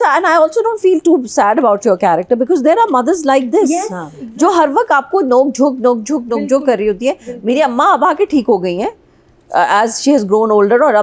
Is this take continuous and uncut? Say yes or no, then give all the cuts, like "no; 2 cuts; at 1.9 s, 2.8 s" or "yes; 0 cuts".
yes; 0 cuts